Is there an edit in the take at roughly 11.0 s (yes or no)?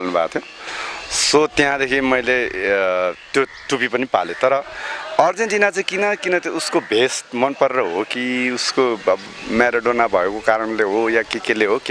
no